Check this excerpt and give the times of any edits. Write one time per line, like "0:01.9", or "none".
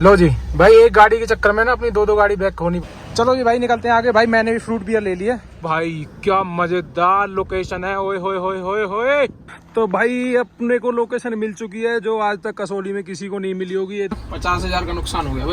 0:02.9
0:05.5
0:09.5
0:14.2